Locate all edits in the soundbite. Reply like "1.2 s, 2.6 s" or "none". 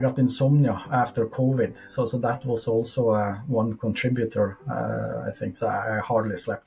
none